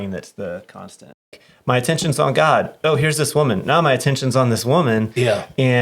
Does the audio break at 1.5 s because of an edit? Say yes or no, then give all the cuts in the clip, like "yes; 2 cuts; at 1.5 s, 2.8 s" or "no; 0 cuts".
yes; 1 cut; at 1.5 s